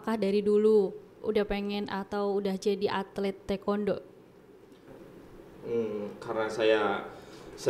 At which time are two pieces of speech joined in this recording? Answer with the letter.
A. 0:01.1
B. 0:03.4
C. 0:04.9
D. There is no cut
C